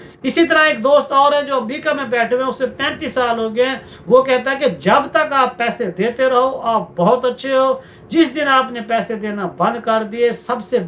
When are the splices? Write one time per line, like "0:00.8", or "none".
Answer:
none